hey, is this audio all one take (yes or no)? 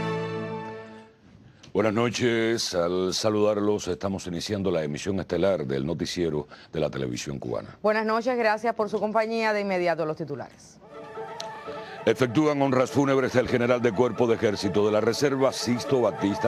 no